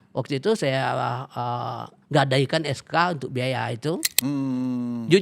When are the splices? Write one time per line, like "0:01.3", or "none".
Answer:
0:04.1